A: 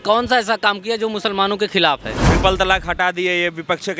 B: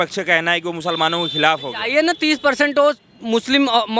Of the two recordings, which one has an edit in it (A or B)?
A